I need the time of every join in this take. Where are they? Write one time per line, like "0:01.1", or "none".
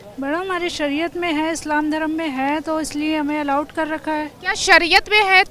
none